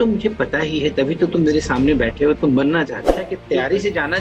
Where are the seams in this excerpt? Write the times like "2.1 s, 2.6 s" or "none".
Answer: 3.3 s